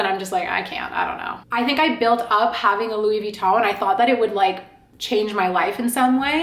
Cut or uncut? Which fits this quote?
cut